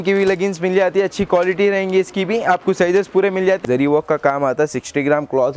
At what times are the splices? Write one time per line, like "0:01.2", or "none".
0:03.6